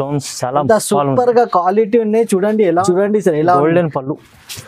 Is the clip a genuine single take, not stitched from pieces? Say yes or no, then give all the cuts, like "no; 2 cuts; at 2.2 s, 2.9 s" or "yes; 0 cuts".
no; 1 cut; at 2.8 s